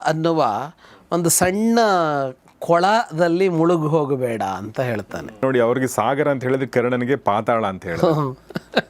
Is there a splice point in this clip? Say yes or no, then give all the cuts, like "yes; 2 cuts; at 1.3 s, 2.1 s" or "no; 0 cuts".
yes; 1 cut; at 5.4 s